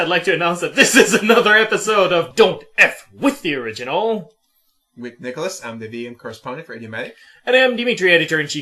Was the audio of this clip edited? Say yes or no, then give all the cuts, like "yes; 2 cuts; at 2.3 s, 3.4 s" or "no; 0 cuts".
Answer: yes; 1 cut; at 6.4 s